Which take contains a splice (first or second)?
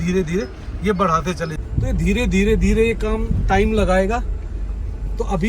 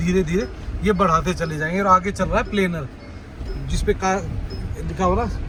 first